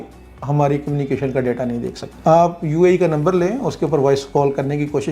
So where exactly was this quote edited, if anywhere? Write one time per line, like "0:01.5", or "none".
0:02.0